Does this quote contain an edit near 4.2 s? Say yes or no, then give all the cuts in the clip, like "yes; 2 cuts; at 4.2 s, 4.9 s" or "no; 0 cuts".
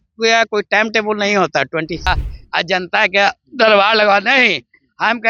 no; 1 cut; at 2.1 s